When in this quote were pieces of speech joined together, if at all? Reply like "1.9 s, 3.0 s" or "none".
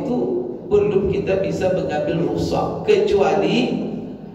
none